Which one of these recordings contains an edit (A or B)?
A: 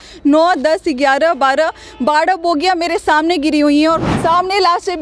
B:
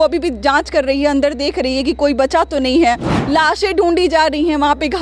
A